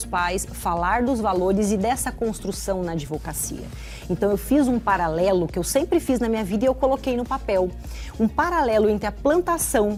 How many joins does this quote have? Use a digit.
0